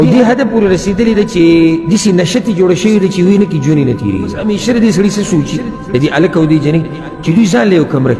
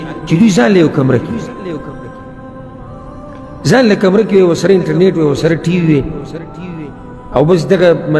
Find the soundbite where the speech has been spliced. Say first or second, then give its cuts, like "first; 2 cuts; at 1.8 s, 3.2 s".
first; 2 cuts; at 1.8 s, 4.4 s